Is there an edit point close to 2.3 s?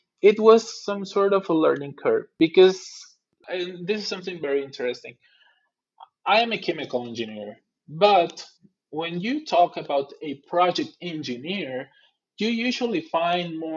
yes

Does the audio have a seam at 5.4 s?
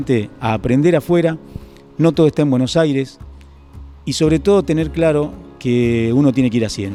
no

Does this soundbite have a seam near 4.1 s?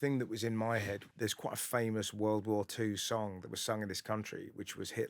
no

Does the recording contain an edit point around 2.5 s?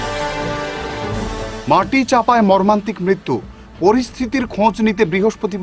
no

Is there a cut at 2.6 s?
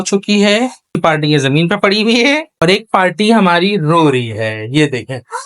yes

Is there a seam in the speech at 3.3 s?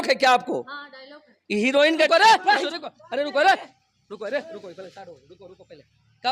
no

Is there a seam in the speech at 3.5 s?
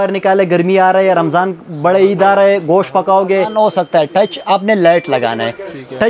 yes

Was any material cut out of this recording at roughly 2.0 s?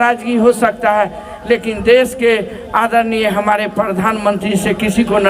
no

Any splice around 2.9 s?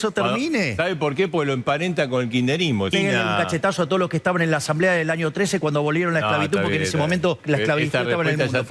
yes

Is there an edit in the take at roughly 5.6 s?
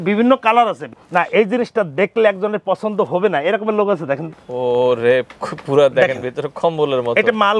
no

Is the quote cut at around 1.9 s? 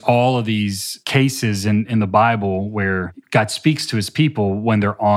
yes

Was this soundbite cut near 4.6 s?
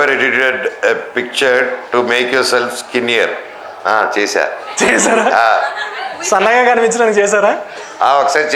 no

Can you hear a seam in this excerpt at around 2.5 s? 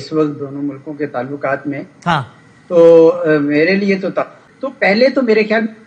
no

